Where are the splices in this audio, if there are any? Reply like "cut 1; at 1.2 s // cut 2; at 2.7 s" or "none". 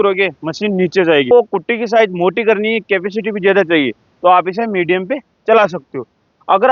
cut 1; at 1.3 s

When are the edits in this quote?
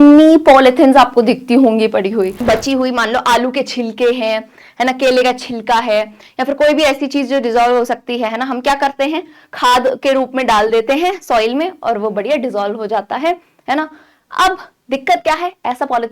cut 1; at 2.4 s

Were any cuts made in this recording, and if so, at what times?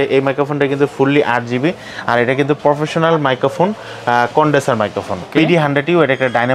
cut 1; at 5.3 s

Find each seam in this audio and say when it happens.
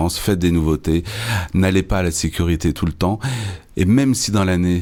none

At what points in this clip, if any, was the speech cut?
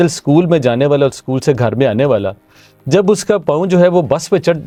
none

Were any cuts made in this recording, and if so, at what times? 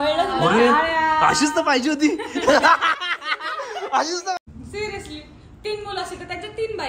cut 1; at 4.5 s

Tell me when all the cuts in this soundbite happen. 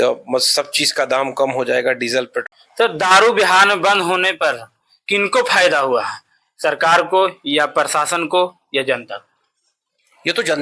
cut 1; at 2.5 s

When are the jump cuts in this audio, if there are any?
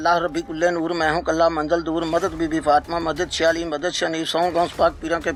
none

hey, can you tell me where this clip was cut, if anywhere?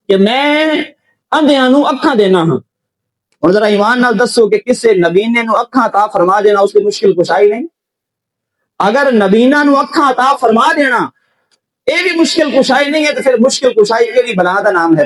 none

